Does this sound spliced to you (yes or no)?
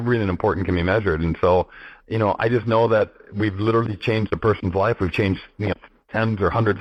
no